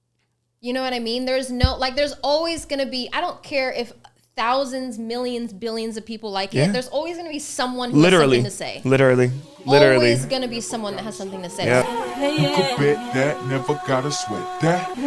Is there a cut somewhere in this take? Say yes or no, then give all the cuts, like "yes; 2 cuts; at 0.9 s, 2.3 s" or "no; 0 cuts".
yes; 1 cut; at 11.8 s